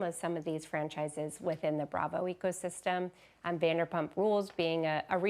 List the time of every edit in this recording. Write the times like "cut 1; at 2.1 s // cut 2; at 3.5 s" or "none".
none